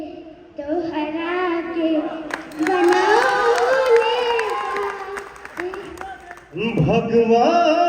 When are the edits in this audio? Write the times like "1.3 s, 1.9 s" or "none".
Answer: 6.6 s